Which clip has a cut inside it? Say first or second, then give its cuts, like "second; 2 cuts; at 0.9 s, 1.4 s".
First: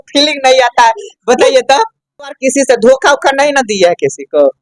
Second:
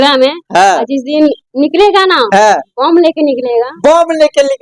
first; 1 cut; at 2.4 s